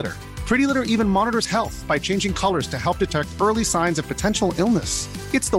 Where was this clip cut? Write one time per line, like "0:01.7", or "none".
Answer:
none